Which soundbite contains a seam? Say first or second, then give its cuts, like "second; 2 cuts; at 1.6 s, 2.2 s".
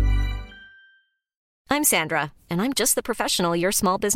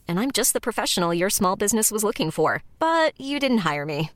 first; 1 cut; at 1.5 s